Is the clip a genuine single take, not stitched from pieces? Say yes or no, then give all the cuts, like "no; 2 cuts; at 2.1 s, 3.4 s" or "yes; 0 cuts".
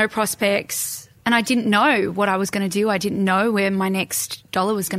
no; 1 cut; at 1.1 s